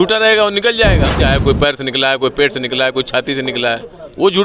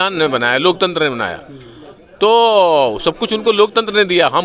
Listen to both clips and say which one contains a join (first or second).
first